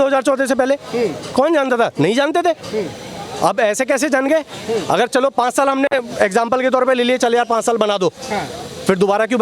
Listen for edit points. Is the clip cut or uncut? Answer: uncut